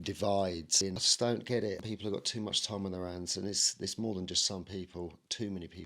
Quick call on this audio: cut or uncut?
cut